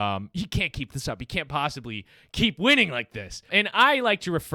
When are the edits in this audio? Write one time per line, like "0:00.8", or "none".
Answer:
0:03.5